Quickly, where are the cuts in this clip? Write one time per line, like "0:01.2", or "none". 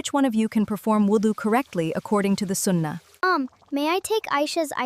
0:03.0